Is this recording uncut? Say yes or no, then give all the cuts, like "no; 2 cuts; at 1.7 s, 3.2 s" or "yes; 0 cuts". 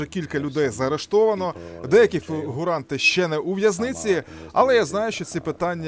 yes; 0 cuts